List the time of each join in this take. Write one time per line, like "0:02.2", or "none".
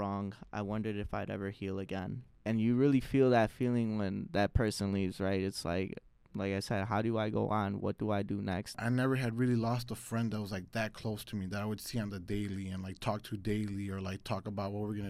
0:02.3
0:08.8